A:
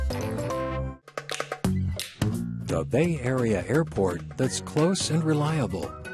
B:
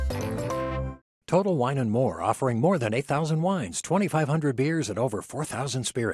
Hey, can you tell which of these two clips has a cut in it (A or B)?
A